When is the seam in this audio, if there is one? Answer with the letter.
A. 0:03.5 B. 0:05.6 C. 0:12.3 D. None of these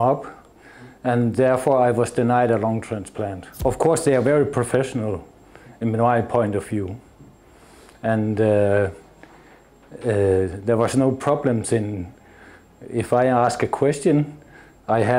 A